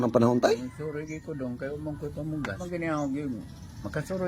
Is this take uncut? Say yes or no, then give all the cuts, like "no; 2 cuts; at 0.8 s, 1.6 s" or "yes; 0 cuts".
no; 1 cut; at 2.7 s